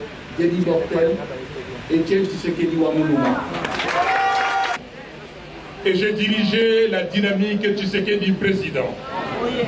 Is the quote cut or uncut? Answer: cut